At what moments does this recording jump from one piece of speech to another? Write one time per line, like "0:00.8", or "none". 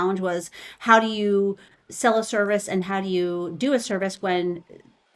none